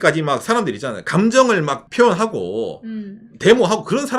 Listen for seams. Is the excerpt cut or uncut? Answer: cut